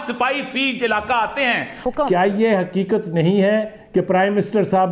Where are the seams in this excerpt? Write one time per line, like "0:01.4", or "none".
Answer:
0:01.7